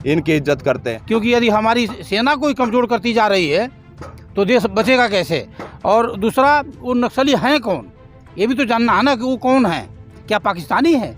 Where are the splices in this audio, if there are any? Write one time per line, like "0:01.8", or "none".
0:00.9